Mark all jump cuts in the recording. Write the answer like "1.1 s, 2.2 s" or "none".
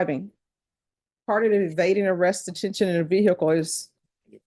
none

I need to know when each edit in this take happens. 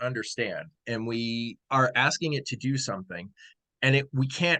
1.0 s

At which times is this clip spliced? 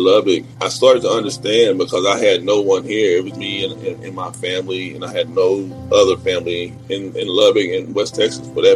6.8 s

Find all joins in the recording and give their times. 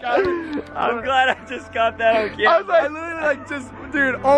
3.0 s

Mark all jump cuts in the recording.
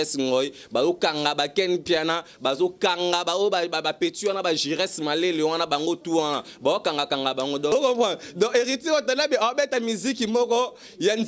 7.7 s

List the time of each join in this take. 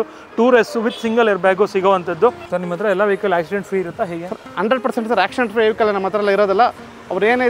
2.4 s

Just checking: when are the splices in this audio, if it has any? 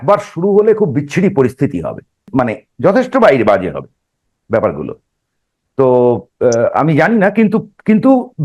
2.3 s

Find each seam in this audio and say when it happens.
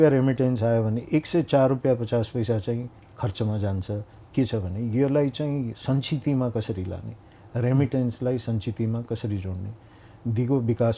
4.1 s

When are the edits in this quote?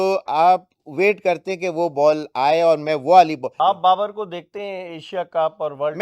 3.5 s

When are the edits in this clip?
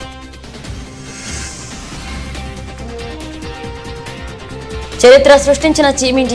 2.3 s, 5.0 s

